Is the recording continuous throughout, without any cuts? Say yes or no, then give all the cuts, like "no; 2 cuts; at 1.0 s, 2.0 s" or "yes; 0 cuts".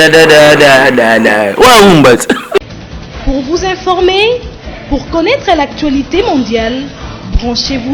no; 1 cut; at 2.6 s